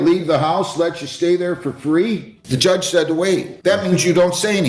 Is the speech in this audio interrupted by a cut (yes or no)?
yes